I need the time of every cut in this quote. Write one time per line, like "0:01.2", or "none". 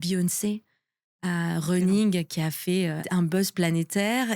0:03.0

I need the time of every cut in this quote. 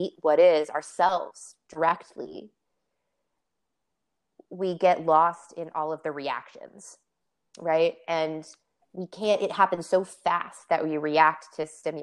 none

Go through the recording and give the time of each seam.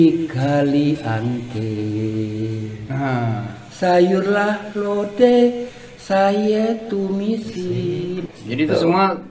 0:08.2

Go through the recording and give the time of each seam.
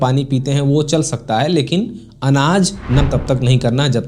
0:03.0

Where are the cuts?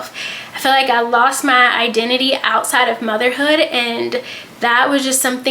none

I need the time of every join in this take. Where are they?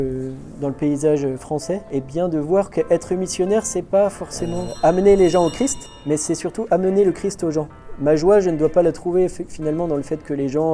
0:01.8
0:04.6
0:05.9

